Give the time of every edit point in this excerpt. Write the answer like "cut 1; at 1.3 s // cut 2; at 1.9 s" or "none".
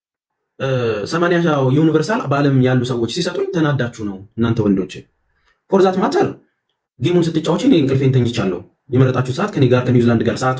none

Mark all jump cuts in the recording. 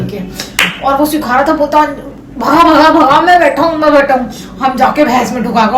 none

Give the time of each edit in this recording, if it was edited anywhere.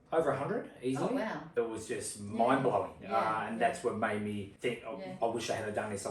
cut 1; at 1.5 s // cut 2; at 4.5 s

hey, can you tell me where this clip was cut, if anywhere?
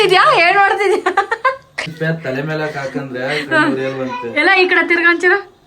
cut 1; at 1.9 s

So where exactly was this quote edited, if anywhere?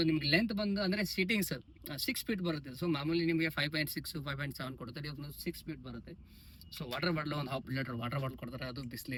none

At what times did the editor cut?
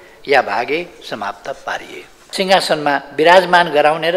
cut 1; at 2.2 s

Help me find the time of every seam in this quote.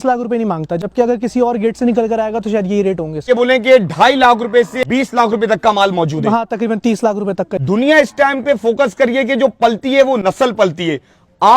cut 1; at 3.3 s // cut 2; at 4.7 s // cut 3; at 7.5 s

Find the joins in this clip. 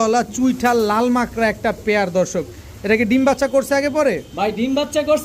none

